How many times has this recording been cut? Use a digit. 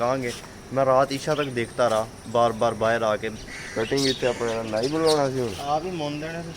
1